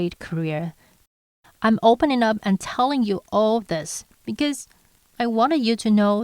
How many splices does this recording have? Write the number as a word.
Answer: one